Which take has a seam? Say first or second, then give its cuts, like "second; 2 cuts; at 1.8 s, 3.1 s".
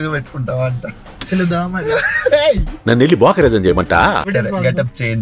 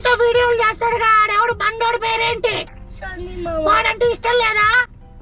first; 1 cut; at 4.2 s